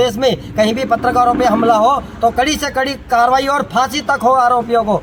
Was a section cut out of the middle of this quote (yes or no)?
no